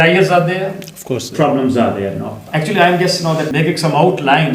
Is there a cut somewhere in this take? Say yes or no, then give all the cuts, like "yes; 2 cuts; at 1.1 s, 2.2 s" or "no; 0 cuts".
yes; 2 cuts; at 2.4 s, 3.5 s